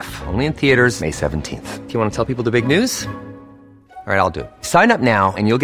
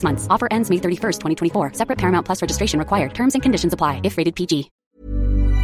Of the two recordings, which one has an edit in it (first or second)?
second